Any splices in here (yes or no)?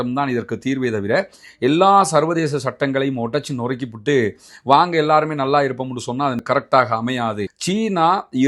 yes